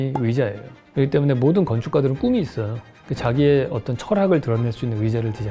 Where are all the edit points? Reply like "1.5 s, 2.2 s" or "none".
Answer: none